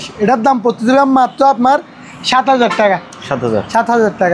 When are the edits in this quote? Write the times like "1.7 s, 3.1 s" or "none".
none